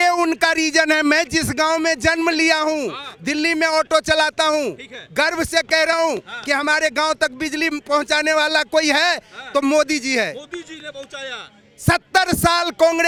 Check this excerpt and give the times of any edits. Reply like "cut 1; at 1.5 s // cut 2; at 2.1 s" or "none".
none